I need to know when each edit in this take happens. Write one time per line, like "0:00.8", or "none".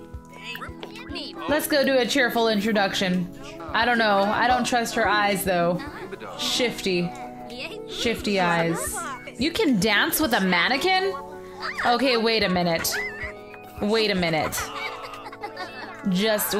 0:09.5